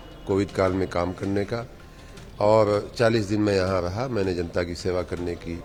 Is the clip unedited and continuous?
yes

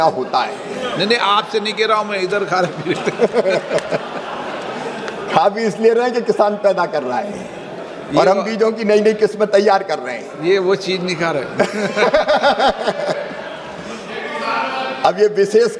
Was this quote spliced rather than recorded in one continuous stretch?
no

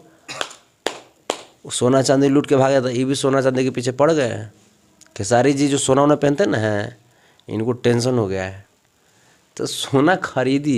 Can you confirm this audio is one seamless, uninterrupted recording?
yes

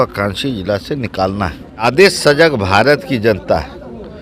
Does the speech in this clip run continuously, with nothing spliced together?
no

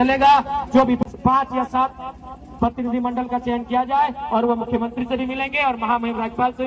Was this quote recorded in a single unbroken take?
no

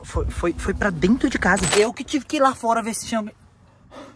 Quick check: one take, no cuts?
no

